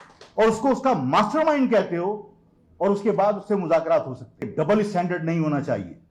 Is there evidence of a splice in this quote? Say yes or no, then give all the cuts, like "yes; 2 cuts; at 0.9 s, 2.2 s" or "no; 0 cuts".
yes; 1 cut; at 4.4 s